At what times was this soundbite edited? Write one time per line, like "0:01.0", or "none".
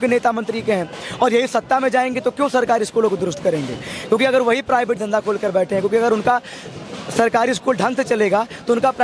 none